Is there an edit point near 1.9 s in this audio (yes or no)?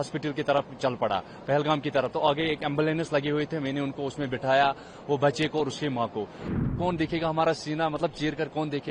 no